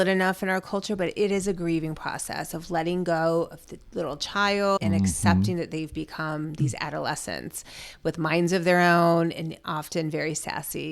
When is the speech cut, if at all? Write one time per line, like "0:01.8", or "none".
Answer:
0:04.8